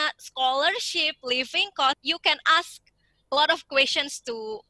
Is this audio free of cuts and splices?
no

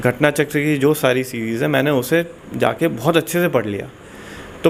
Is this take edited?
no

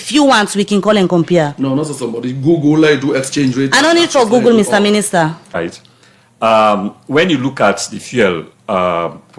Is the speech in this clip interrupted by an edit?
yes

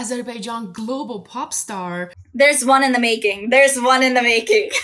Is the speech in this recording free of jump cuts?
yes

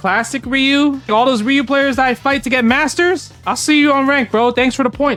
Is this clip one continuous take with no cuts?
yes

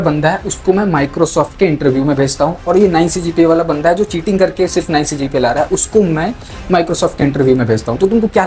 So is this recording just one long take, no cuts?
yes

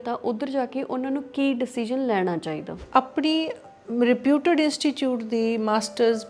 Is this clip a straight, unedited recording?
no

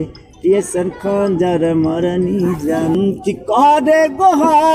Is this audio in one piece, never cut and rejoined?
no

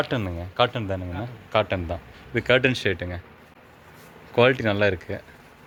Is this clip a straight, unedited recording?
yes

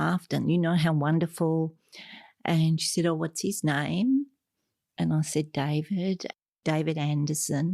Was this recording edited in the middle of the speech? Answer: yes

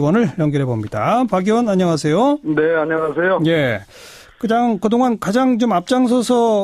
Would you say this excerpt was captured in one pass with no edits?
yes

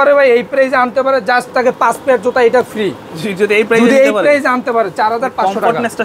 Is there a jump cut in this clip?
no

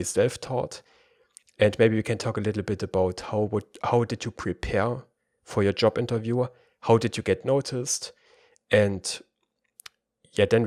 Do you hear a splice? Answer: no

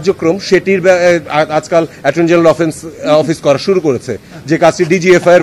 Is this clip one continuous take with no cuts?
yes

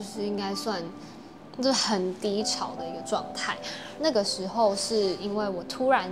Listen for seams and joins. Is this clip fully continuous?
no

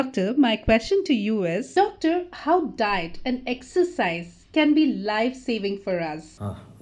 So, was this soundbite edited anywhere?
yes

